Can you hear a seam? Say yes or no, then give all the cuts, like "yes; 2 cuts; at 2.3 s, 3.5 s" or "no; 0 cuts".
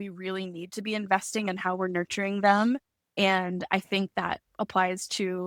no; 0 cuts